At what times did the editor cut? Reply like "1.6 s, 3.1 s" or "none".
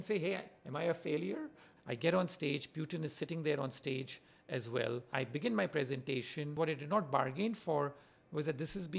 1.7 s, 5.1 s, 6.5 s